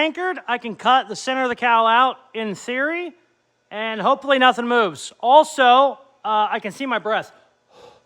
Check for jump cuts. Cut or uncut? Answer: uncut